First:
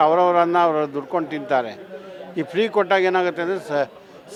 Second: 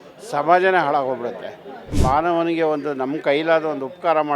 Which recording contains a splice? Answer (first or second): second